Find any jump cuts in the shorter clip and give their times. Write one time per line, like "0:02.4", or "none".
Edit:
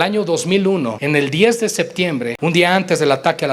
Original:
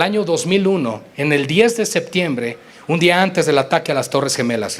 0:01.0
0:02.3